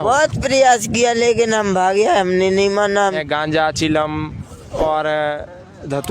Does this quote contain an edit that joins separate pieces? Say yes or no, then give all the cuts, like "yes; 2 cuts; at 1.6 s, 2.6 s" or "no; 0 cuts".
yes; 1 cut; at 3.2 s